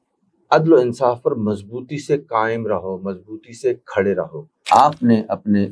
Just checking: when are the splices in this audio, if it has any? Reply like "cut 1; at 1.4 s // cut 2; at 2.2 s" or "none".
cut 1; at 4.7 s